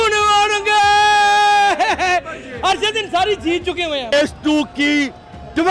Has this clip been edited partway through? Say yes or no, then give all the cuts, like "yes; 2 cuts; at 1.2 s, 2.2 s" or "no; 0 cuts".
yes; 1 cut; at 4.1 s